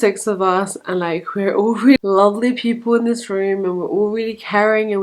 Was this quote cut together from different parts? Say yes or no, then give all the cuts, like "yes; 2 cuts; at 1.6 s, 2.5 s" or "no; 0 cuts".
yes; 1 cut; at 2.0 s